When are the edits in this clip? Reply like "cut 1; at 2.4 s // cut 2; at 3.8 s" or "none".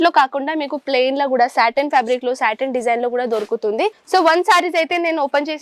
cut 1; at 4.0 s